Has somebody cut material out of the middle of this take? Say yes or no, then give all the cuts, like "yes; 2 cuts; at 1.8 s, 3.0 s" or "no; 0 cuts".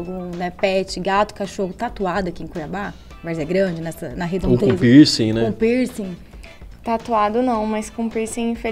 no; 0 cuts